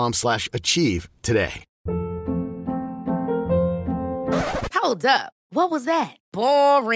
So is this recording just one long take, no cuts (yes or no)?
no